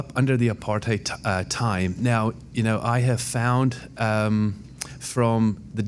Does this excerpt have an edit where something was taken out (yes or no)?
no